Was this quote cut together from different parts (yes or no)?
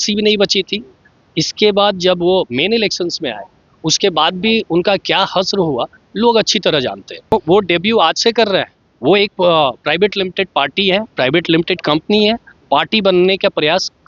yes